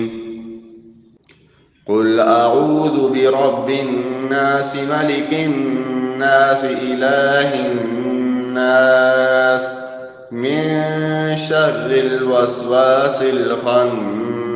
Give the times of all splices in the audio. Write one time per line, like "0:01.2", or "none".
none